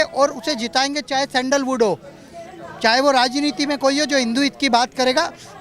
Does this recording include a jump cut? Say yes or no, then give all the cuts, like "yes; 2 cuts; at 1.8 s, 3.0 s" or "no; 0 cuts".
no; 0 cuts